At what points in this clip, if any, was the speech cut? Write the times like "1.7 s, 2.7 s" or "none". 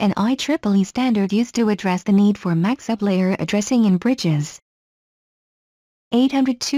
1.3 s